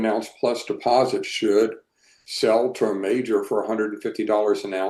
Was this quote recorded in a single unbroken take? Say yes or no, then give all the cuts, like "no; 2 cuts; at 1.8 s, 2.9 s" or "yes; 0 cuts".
yes; 0 cuts